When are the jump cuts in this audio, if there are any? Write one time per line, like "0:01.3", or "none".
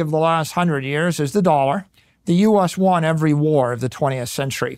none